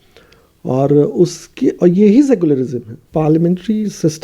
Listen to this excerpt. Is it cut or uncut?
cut